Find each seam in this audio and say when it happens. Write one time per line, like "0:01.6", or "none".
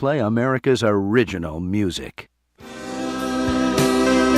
0:02.2